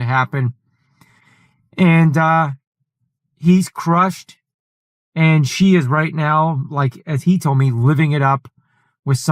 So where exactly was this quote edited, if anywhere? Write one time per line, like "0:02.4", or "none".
none